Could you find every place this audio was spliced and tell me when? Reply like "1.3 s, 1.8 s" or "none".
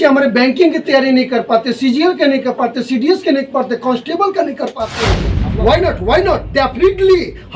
5.3 s